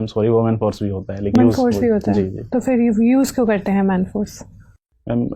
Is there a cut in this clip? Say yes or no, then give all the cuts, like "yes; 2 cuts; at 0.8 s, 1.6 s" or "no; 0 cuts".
yes; 1 cut; at 1.3 s